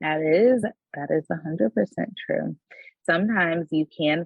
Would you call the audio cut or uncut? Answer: cut